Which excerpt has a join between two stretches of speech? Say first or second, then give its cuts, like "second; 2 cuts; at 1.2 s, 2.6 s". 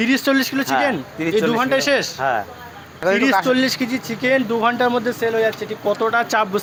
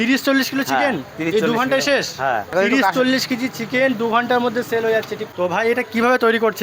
second; 2 cuts; at 2.5 s, 5.2 s